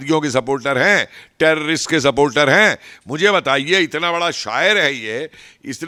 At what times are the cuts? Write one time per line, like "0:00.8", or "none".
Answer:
none